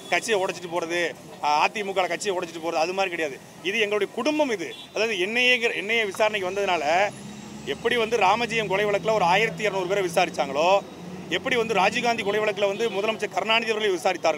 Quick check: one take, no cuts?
no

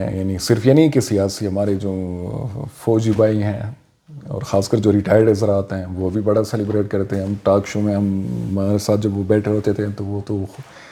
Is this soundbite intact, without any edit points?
yes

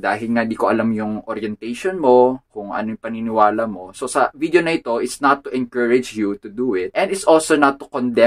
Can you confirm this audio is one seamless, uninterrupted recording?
yes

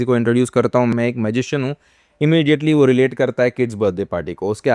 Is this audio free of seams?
no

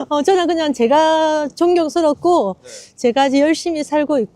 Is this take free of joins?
yes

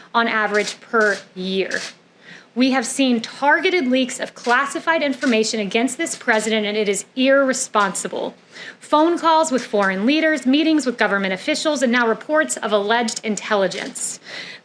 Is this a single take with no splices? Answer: yes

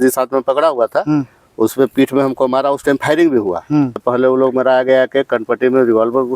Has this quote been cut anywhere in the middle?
yes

